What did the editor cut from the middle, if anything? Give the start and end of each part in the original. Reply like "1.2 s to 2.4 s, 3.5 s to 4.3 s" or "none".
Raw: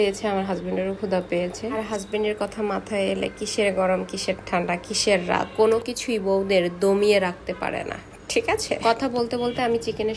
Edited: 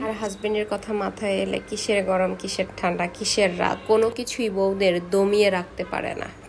none